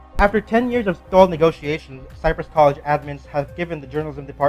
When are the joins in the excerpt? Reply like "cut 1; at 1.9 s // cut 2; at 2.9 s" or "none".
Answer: cut 1; at 1.7 s